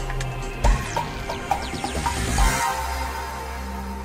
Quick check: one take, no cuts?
yes; 0 cuts

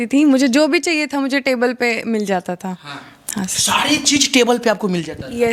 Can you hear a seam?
no; 0 cuts

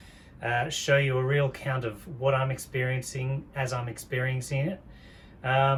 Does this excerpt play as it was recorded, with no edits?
yes; 0 cuts

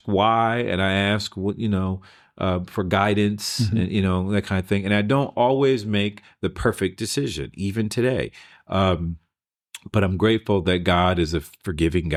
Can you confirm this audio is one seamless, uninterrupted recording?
yes; 0 cuts

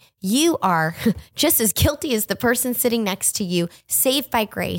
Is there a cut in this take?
no; 0 cuts

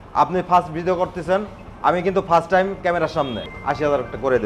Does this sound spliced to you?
yes; 1 cut; at 3.5 s

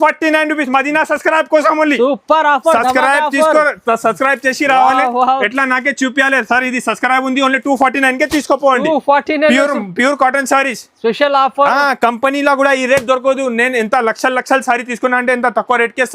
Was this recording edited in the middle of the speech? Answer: no; 0 cuts

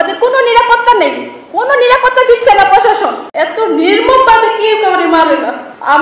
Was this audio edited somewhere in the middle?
yes; 1 cut; at 3.2 s

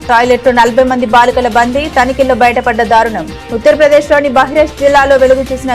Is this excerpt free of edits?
yes; 0 cuts

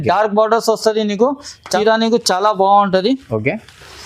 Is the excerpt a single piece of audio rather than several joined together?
no; 1 cut; at 1.7 s

